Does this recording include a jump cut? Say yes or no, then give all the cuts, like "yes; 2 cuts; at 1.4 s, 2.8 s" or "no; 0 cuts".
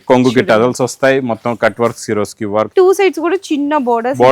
yes; 1 cut; at 2.7 s